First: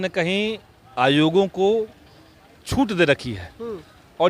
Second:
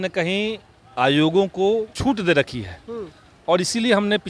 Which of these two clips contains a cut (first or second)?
second